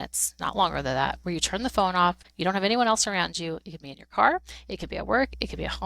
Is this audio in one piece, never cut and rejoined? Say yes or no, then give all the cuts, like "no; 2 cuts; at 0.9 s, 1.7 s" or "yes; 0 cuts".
no; 1 cut; at 2.3 s